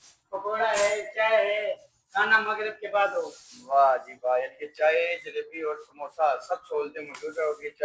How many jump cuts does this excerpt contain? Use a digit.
0